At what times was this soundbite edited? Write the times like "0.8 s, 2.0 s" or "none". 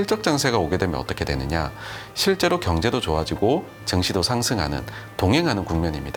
none